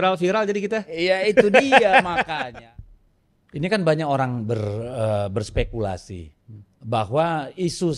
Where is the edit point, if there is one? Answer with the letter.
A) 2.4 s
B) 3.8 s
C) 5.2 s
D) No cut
A